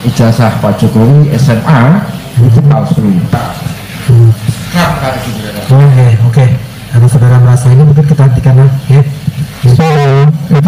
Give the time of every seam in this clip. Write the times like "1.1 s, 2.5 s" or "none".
3.3 s